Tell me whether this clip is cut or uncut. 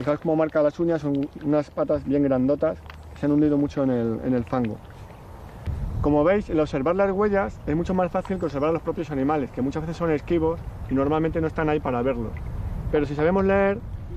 uncut